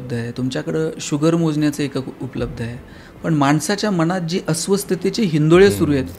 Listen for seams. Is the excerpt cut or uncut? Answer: uncut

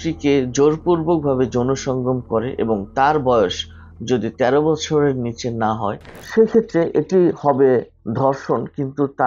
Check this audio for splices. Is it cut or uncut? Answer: cut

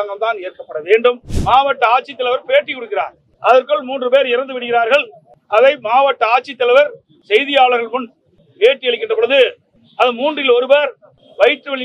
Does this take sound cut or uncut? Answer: cut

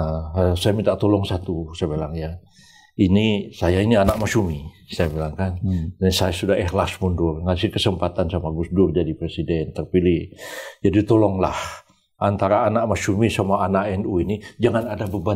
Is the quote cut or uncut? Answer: uncut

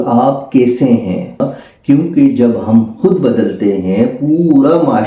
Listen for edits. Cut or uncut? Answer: cut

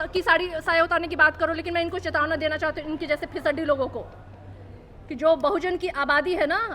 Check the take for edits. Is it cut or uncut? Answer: uncut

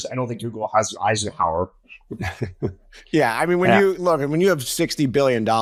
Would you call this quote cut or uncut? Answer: uncut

